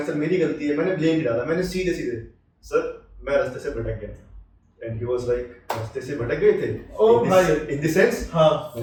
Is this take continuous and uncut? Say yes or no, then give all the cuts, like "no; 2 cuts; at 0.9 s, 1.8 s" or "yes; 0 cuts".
yes; 0 cuts